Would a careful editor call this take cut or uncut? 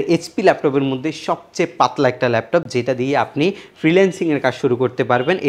uncut